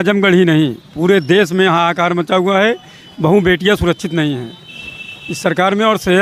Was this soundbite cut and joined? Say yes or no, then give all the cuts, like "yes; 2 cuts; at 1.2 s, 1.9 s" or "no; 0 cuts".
no; 0 cuts